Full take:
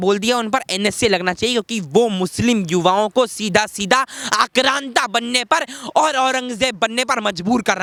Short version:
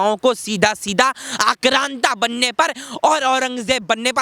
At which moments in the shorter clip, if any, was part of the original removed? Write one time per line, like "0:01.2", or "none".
none